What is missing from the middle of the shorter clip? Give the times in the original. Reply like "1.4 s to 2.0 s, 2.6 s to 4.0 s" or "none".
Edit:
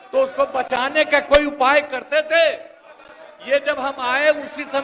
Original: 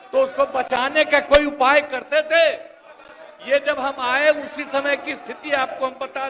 none